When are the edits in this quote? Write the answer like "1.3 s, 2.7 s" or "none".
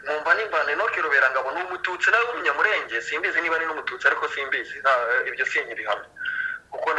none

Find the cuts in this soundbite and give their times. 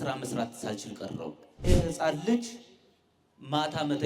1.6 s

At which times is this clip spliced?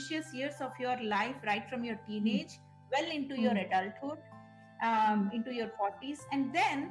none

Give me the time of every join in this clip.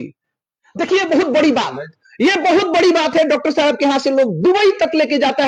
none

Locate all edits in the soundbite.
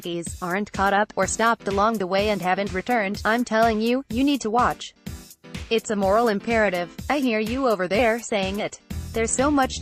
none

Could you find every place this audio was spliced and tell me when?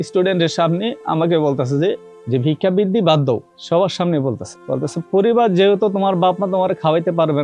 2.1 s, 3.5 s, 4.5 s

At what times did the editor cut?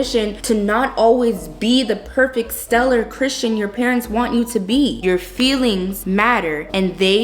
5.0 s

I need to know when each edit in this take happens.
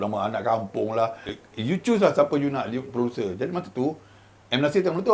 1.3 s

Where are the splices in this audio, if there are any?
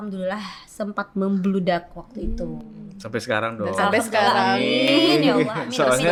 none

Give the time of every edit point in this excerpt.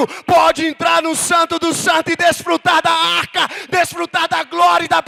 none

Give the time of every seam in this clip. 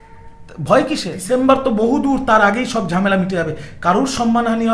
1.1 s

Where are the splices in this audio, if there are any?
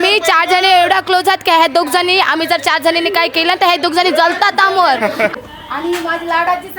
5.3 s

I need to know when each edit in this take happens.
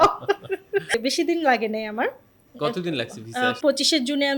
0.9 s, 3.6 s

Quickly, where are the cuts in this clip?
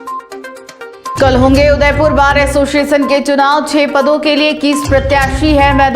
none

